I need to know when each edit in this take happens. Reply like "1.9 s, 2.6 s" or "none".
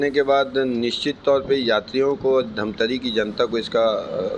none